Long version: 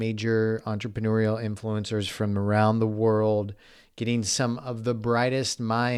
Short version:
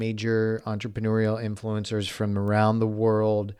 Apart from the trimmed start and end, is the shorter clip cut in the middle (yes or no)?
no